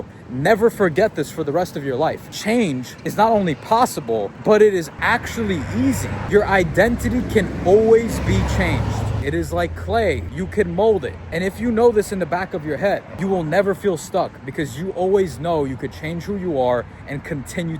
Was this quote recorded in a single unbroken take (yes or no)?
no